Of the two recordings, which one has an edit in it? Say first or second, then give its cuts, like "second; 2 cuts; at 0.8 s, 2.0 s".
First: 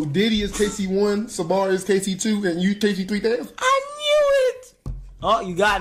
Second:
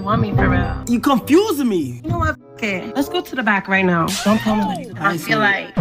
second; 1 cut; at 4.9 s